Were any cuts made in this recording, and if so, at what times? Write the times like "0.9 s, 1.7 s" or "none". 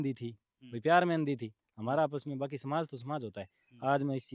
none